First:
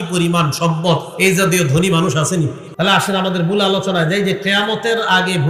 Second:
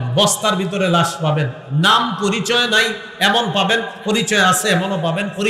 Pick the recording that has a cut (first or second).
first